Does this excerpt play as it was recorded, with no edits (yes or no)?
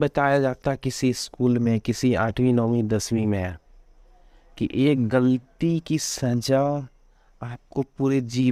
yes